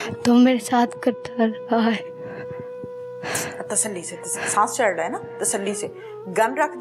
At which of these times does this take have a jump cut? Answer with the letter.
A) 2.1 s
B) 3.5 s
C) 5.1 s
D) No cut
D